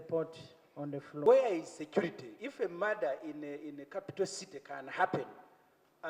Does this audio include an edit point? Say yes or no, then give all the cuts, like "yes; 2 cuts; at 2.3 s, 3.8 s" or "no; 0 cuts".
yes; 1 cut; at 1.3 s